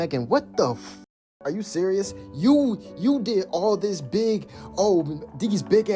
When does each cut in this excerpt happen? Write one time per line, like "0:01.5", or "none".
0:01.0